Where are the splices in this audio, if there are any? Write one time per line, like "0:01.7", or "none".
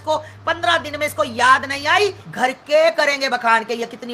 0:02.2